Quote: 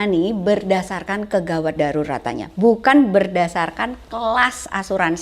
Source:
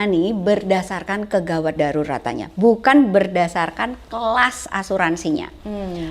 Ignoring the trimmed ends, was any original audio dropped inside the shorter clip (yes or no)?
no